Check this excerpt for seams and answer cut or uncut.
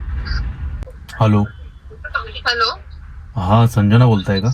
cut